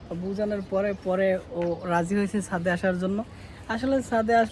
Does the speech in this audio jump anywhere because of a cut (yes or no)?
no